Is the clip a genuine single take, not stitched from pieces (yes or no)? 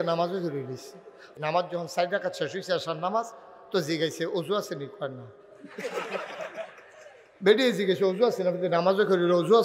no